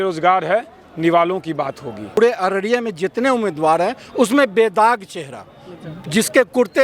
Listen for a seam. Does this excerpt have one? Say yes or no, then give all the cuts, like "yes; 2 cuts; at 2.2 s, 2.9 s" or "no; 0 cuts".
yes; 1 cut; at 2.2 s